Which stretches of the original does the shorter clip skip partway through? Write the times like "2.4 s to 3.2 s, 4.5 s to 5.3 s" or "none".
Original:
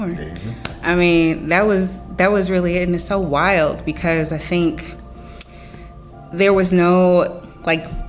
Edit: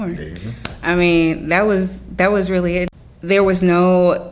2.9 s to 6.0 s